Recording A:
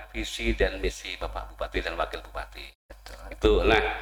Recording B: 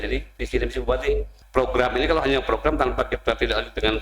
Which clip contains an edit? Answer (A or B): B